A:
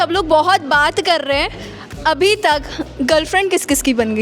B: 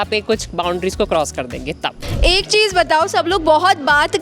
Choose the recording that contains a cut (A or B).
B